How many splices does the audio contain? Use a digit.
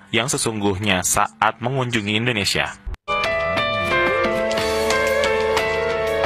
1